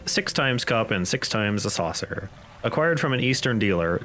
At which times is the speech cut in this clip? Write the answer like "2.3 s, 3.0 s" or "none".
none